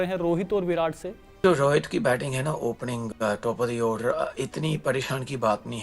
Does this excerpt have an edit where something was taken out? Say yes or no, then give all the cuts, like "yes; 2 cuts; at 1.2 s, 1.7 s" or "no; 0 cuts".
yes; 1 cut; at 1.4 s